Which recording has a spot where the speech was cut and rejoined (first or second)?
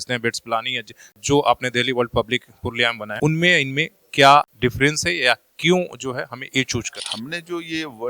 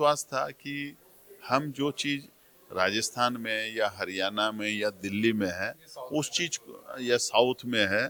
first